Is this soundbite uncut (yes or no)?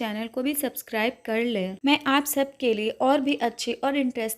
no